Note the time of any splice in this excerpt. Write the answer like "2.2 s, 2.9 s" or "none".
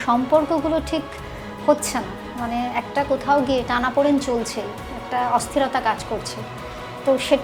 none